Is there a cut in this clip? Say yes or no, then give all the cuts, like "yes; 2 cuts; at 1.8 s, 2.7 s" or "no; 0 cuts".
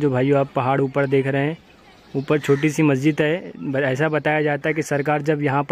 no; 0 cuts